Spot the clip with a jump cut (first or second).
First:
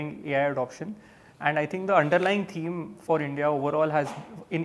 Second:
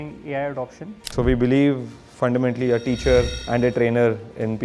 second